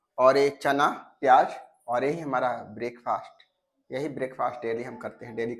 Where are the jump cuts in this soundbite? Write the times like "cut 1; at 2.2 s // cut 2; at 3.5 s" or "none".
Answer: none